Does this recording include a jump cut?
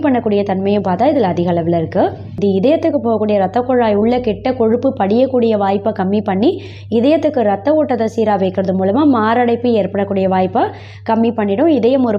yes; 1 cut; at 2.4 s

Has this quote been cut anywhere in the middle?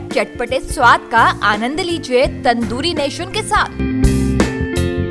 no; 0 cuts

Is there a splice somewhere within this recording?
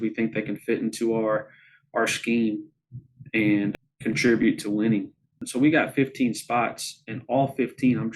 yes; 2 cuts; at 3.8 s, 5.4 s

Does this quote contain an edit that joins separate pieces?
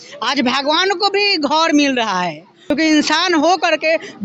yes; 1 cut; at 2.6 s

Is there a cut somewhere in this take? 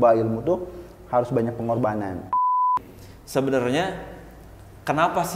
yes; 1 cut; at 2.5 s

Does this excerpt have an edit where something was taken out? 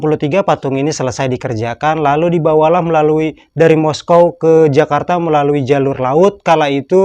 no; 0 cuts

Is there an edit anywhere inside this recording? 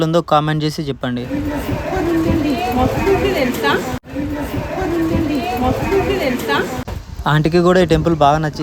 no; 0 cuts

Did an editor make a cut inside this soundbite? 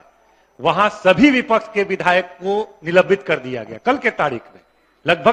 no; 0 cuts

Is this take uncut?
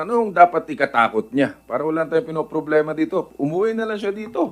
yes; 0 cuts

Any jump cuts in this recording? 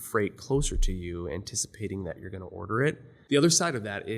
yes; 1 cut; at 3.1 s

